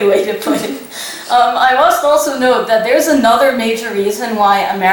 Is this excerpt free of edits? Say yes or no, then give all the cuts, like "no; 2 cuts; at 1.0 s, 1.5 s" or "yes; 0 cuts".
yes; 0 cuts